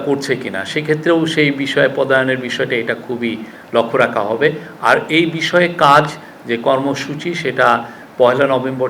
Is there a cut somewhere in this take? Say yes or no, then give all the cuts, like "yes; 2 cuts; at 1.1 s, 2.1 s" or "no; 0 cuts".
no; 0 cuts